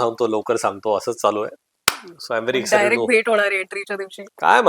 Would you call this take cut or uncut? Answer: uncut